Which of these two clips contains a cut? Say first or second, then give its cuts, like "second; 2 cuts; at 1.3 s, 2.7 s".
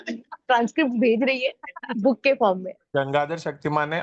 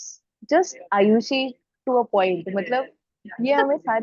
first; 1 cut; at 2.8 s